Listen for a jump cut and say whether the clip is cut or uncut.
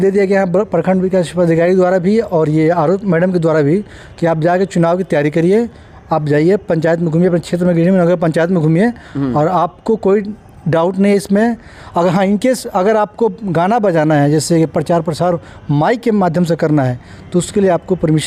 uncut